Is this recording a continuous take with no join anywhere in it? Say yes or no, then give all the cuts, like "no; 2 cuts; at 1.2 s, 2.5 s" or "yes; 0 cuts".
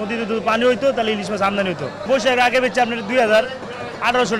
yes; 0 cuts